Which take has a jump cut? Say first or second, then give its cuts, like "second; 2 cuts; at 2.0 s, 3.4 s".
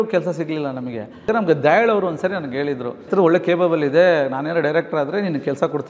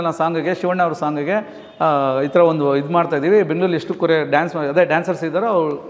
first; 2 cuts; at 1.3 s, 3.1 s